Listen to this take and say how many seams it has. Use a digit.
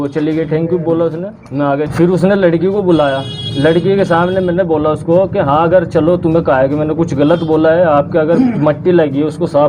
1